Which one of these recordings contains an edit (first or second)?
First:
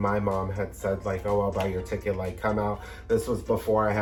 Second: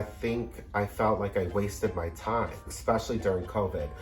second